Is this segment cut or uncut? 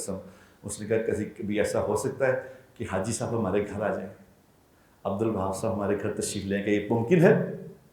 uncut